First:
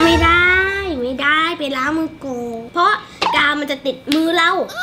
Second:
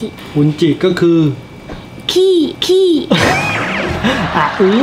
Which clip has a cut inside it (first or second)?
first